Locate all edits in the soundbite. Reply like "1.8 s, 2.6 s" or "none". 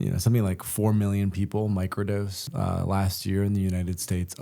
2.4 s